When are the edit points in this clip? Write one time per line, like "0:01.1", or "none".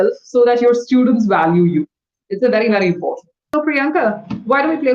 0:03.4